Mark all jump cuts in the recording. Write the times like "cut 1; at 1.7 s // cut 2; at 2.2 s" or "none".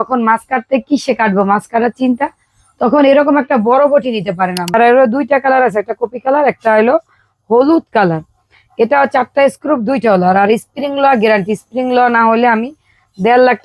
cut 1; at 4.7 s